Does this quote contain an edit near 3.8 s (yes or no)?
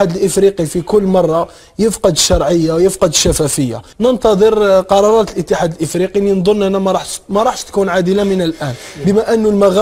yes